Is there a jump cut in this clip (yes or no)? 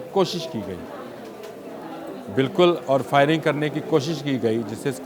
no